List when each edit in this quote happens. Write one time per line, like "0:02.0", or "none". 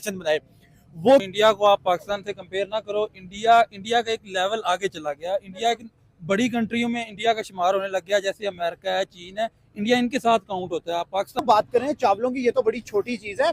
0:01.2
0:11.4